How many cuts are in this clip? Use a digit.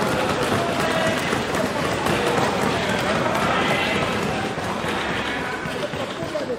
0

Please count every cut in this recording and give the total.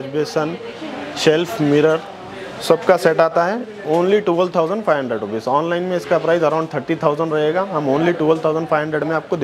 0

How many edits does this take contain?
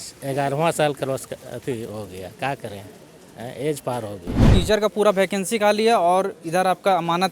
1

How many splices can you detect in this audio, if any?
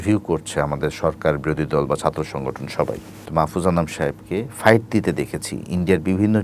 1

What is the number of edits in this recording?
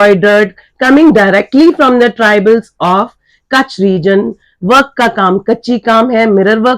0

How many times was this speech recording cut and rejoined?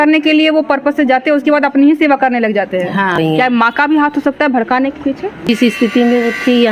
2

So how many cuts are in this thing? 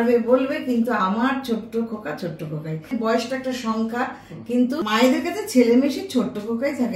1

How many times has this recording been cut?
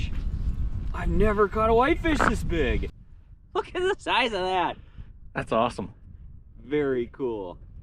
1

